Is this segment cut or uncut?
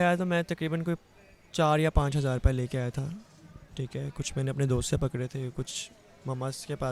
uncut